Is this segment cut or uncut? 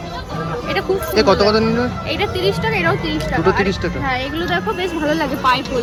uncut